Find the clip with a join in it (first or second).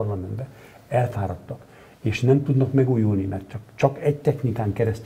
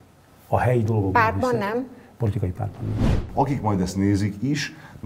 second